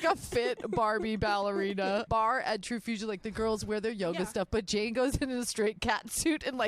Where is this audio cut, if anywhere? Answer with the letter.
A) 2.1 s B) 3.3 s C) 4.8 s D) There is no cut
A